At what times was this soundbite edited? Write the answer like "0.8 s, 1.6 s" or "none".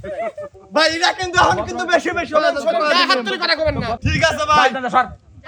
4.0 s